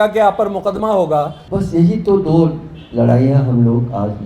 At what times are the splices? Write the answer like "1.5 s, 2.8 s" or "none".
1.4 s